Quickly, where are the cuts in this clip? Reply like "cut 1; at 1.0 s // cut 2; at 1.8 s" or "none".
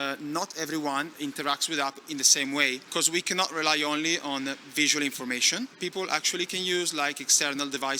cut 1; at 1.1 s // cut 2; at 2.8 s // cut 3; at 5.7 s

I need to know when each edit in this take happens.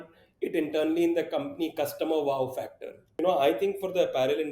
cut 1; at 3.2 s

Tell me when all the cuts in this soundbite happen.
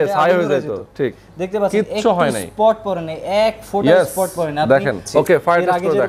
cut 1; at 5.0 s

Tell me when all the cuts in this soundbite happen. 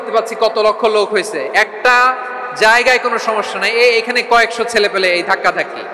none

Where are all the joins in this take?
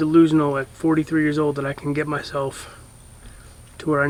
none

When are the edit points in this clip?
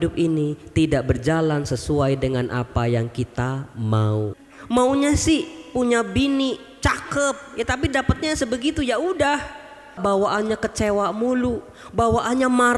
cut 1; at 4.4 s // cut 2; at 10.0 s

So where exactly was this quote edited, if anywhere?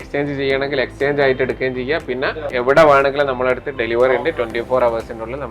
cut 1; at 2.5 s

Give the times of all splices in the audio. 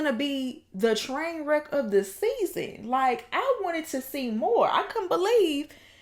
none

